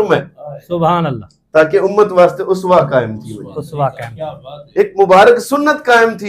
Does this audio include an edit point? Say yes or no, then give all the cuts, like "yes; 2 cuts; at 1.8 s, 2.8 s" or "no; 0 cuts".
no; 0 cuts